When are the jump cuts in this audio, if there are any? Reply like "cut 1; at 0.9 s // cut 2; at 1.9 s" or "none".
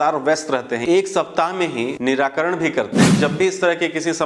cut 1; at 0.8 s // cut 2; at 2.0 s // cut 3; at 3.2 s

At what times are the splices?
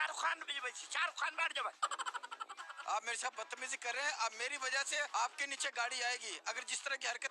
cut 1; at 2.6 s // cut 2; at 5.1 s

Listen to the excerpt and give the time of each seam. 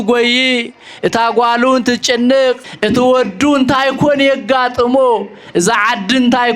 cut 1; at 2.7 s

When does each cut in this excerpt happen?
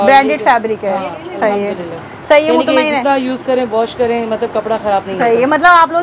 none

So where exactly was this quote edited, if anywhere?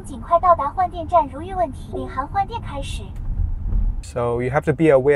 cut 1; at 4.0 s

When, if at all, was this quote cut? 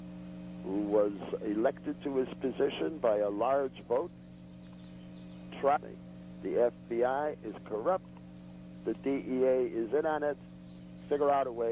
none

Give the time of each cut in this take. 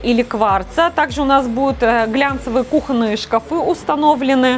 none

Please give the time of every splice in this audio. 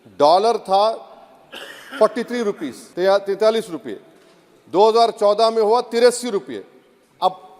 cut 1; at 2.8 s

